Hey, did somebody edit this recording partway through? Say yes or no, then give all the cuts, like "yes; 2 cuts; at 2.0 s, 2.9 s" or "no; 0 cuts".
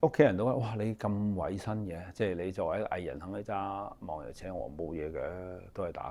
no; 0 cuts